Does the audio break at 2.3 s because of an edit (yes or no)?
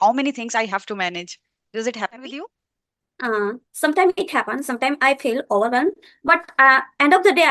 no